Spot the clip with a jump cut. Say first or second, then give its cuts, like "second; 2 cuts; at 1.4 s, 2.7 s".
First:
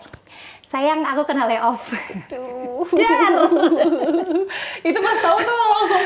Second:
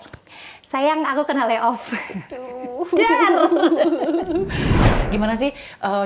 second; 1 cut; at 4.8 s